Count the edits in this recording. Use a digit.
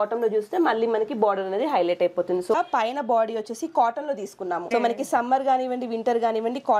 2